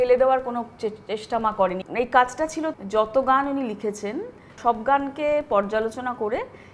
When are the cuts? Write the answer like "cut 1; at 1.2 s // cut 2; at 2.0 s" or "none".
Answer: cut 1; at 1.8 s // cut 2; at 2.7 s // cut 3; at 4.5 s